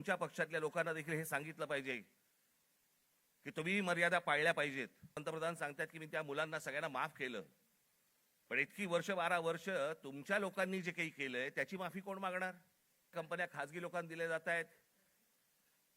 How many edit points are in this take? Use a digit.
2